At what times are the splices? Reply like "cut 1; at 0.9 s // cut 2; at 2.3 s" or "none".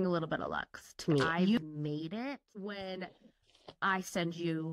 cut 1; at 1.3 s // cut 2; at 2.5 s